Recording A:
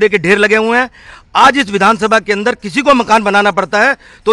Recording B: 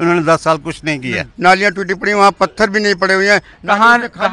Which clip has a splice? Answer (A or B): B